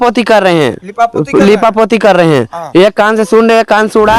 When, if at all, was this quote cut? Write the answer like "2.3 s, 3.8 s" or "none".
none